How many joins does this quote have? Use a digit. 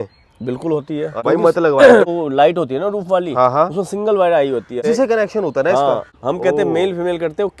4